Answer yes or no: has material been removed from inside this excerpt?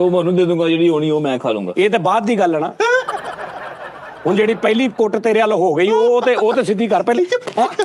no